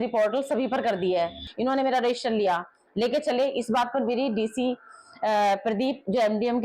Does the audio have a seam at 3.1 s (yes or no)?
no